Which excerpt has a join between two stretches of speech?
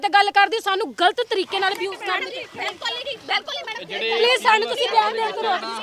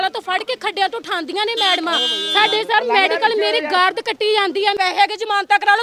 second; 1 cut; at 4.8 s

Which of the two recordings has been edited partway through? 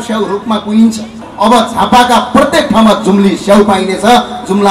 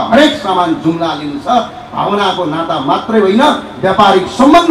first; 1 cut; at 1.2 s

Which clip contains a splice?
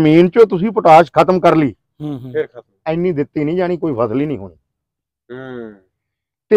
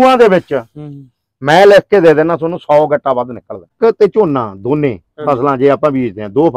second; 1 cut; at 3.7 s

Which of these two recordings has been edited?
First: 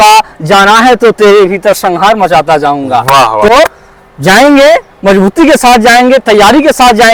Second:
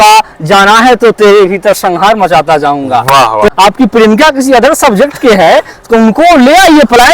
second; 1 cut; at 3.5 s

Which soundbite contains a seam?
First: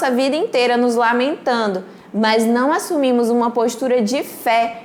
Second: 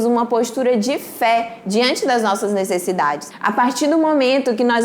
second; 1 cut; at 3.3 s

